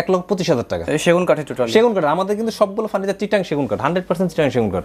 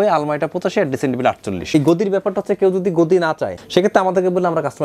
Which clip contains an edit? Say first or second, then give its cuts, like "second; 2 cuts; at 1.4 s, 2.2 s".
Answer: second; 2 cuts; at 1.7 s, 3.6 s